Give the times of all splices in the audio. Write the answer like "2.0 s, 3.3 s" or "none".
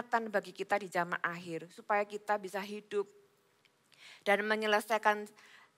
none